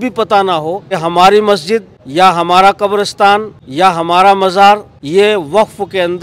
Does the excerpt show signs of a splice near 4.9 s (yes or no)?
yes